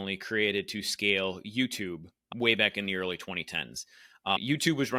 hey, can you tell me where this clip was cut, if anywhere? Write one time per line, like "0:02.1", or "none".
none